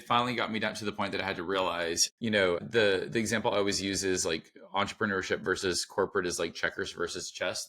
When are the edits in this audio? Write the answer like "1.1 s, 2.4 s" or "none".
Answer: 2.3 s